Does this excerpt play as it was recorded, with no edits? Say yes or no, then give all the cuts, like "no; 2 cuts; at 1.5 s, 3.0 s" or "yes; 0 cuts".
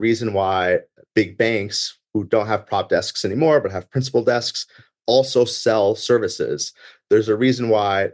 yes; 0 cuts